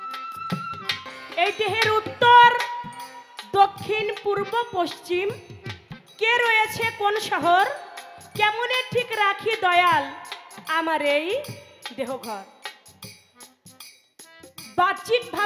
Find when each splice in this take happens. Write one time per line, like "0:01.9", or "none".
0:01.1